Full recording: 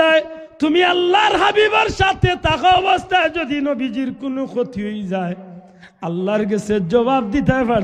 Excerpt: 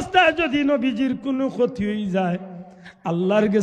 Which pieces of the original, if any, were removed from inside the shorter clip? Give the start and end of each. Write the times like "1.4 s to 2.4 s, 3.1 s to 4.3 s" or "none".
none